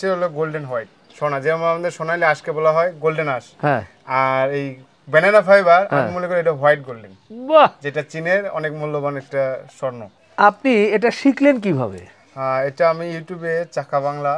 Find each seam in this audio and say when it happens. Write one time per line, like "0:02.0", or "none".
none